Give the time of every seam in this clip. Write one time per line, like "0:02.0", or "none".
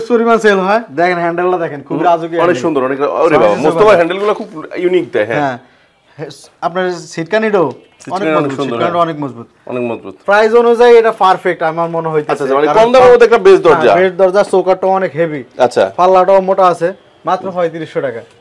0:10.1